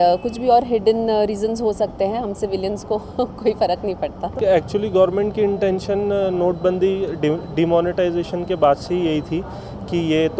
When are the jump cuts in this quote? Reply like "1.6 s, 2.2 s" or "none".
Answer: 4.4 s